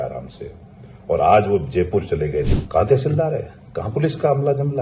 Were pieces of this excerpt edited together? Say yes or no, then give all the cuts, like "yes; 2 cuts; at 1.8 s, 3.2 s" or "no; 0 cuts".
yes; 1 cut; at 2.6 s